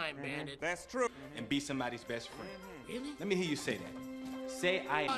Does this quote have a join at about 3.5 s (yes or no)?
no